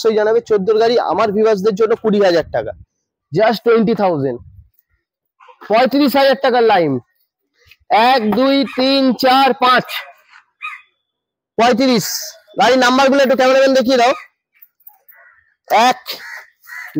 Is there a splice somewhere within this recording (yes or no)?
no